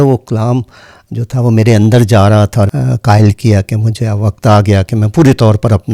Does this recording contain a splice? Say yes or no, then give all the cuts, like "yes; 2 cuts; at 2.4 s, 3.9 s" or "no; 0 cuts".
yes; 1 cut; at 2.7 s